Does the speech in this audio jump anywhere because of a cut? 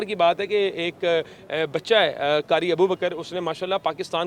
no; 0 cuts

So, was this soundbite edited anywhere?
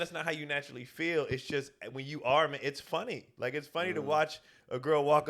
yes; 1 cut; at 3.2 s

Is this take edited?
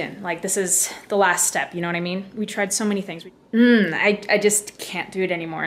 yes; 1 cut; at 3.1 s

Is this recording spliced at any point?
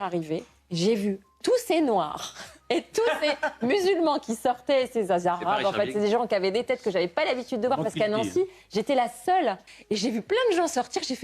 yes; 1 cut; at 9.7 s

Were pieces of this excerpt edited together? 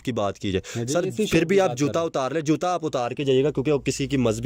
no; 0 cuts

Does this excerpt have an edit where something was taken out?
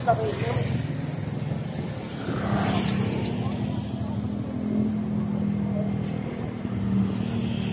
no; 0 cuts

